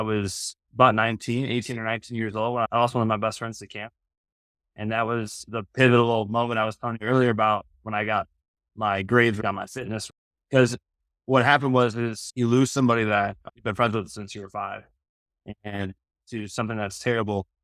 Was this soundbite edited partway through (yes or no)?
no